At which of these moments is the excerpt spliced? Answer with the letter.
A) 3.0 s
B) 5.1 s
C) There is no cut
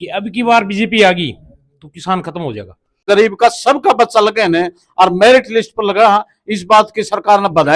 A